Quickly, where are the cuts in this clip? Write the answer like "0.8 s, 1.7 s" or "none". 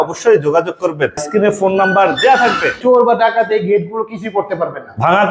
1.2 s, 2.8 s